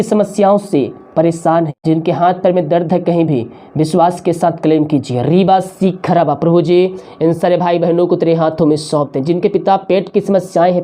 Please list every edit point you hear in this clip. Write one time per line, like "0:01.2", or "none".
0:01.8